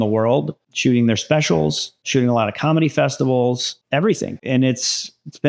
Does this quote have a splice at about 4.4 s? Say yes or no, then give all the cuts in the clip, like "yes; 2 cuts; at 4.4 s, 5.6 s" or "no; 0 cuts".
yes; 1 cut; at 4.4 s